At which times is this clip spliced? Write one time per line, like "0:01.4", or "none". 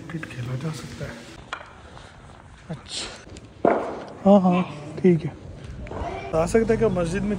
0:01.4
0:03.6
0:06.3